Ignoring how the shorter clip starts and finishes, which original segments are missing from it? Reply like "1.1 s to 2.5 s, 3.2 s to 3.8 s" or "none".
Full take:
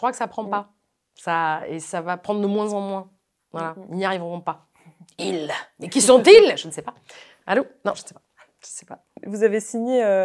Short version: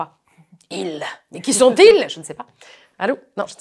none